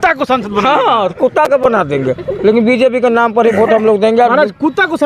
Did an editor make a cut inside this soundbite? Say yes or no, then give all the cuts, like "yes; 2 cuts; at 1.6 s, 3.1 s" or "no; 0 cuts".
no; 0 cuts